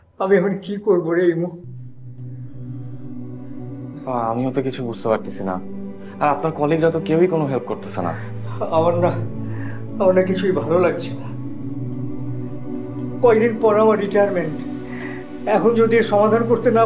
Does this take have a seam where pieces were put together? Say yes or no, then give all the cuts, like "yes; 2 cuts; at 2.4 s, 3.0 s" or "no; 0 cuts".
no; 0 cuts